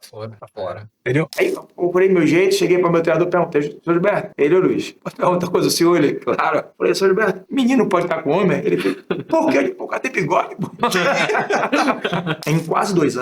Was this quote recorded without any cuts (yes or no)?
no